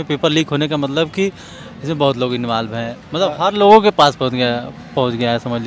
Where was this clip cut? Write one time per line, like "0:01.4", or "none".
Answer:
none